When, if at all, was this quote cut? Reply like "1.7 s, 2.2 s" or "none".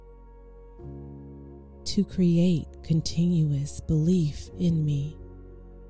1.7 s, 5.1 s